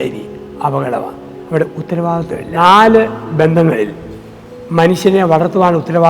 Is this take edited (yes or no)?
yes